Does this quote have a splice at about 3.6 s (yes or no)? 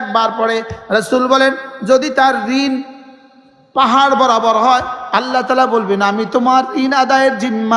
no